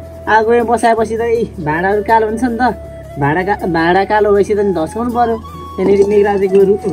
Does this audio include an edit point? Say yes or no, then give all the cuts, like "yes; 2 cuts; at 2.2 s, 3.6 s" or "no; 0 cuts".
no; 0 cuts